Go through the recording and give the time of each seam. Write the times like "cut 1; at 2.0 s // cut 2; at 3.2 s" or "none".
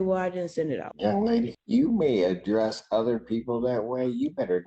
cut 1; at 0.9 s // cut 2; at 1.6 s